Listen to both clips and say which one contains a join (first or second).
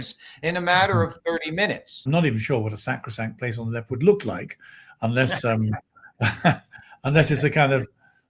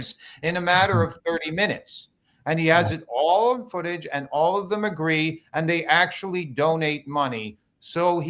first